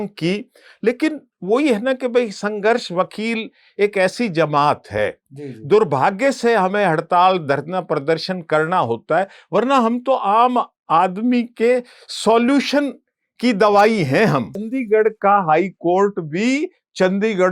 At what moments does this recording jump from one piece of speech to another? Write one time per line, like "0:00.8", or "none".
0:14.7

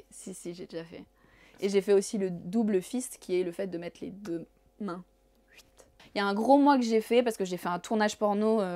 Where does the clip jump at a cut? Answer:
0:06.0

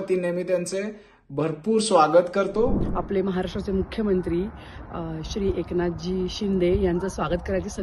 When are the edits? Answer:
0:02.8

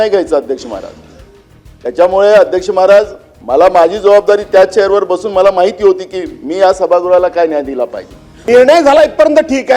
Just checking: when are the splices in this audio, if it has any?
0:08.4

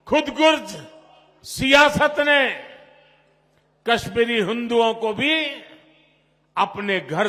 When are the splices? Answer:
none

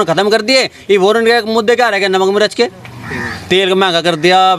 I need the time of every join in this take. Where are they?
none

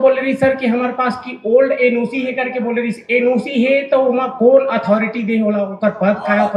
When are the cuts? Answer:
none

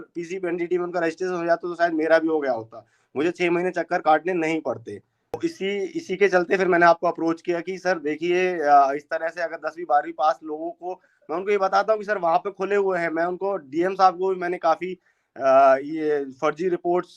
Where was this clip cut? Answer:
0:05.4

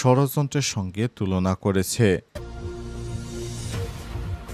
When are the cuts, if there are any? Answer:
0:02.3

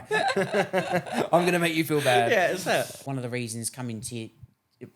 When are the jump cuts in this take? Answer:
0:03.0

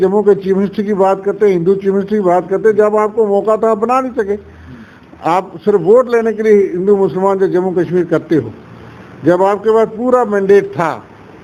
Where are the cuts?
none

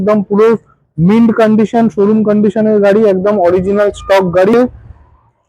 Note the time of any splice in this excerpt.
0:04.5

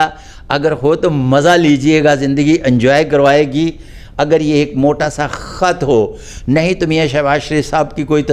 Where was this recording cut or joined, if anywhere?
none

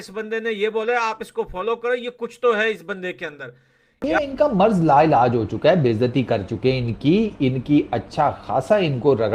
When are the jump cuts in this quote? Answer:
0:04.0

